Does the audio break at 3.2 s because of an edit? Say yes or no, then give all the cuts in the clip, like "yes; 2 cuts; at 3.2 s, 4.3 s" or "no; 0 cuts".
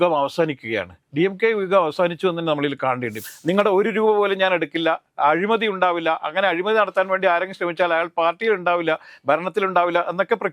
yes; 1 cut; at 3.2 s